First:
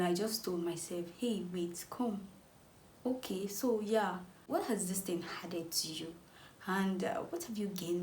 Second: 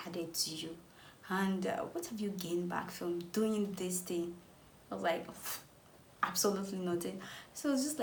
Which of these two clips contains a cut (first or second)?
first